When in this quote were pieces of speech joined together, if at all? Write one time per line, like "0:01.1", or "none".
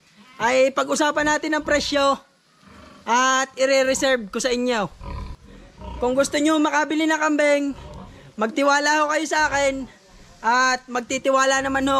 0:05.4